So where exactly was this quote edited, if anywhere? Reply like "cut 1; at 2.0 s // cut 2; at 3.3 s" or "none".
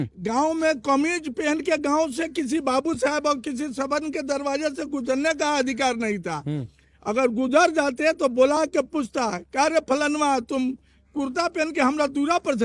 none